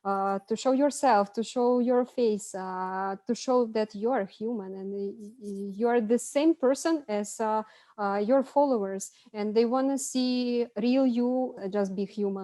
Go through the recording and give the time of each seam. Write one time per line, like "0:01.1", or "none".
0:11.5